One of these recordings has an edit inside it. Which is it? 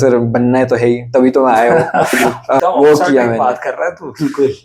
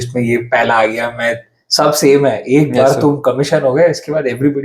first; 1 cut; at 2.5 s

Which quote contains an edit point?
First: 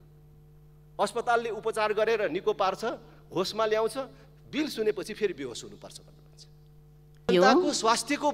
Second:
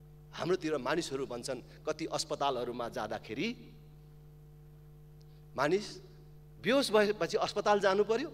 first; 1 cut; at 7.3 s

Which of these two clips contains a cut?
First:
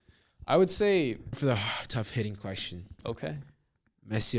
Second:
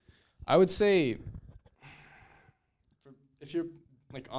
first; 1 cut; at 1.4 s

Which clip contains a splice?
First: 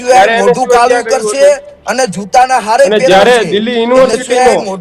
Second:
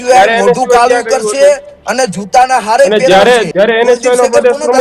second; 1 cut; at 3.5 s

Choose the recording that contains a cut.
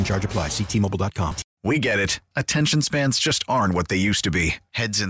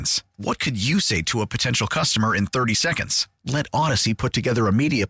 first; 1 cut; at 1.5 s

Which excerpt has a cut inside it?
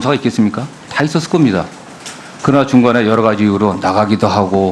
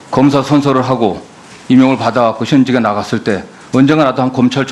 second; 1 cut; at 1.5 s

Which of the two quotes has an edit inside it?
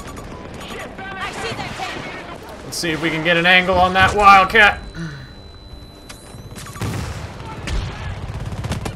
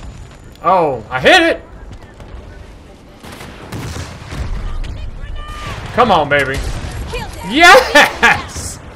first; 1 cut; at 2.4 s

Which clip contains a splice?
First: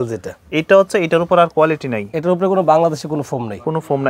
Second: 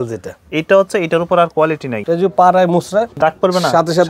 second; 2 cuts; at 2.0 s, 3.1 s

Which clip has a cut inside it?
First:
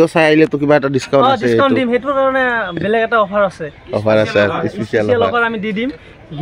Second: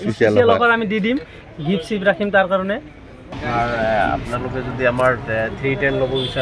second; 1 cut; at 3.4 s

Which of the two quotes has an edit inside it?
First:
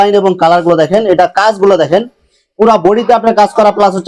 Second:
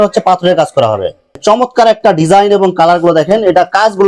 second; 1 cut; at 1.4 s

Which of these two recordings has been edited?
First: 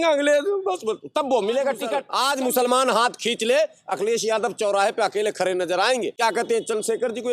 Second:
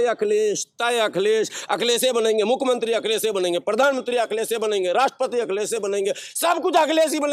first; 2 cuts; at 2.1 s, 6.2 s

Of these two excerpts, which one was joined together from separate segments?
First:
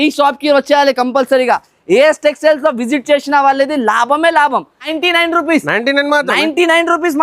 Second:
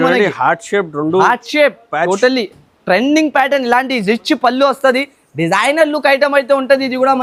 first; 1 cut; at 4.9 s

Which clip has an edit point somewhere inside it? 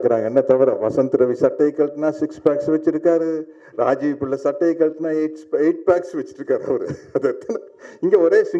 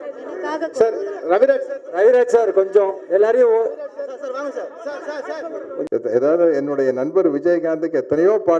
second; 1 cut; at 5.8 s

